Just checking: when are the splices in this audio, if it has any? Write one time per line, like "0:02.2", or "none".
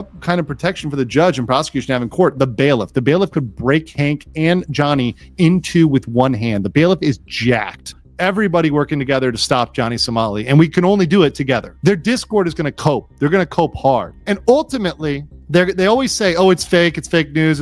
0:07.9
0:11.7
0:14.1
0:15.3